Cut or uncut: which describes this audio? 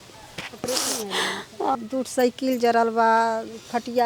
cut